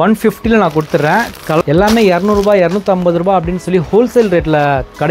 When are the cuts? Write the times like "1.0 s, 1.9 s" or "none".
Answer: 1.6 s